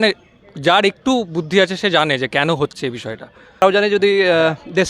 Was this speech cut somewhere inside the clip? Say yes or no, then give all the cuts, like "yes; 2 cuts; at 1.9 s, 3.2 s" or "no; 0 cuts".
yes; 1 cut; at 3.6 s